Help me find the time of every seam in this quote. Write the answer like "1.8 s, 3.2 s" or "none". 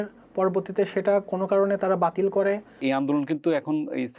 2.8 s